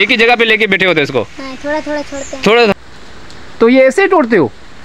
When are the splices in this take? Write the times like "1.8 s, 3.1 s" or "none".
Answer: 2.7 s